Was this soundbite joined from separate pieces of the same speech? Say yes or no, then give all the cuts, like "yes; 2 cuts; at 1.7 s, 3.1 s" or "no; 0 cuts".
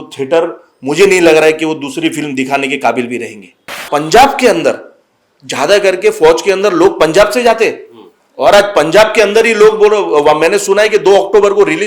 yes; 1 cut; at 3.8 s